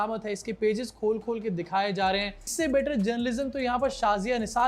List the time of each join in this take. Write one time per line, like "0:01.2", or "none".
0:02.5